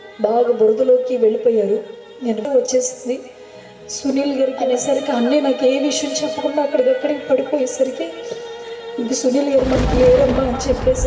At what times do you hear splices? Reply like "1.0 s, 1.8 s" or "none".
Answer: 2.5 s, 4.6 s

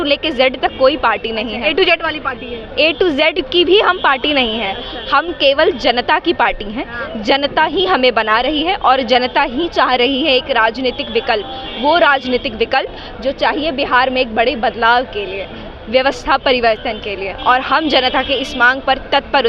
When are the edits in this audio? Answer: none

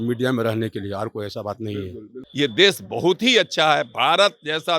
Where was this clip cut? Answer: 2.2 s

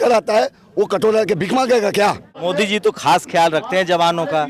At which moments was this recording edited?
2.3 s

